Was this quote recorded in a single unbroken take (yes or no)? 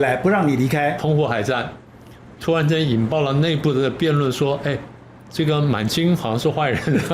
no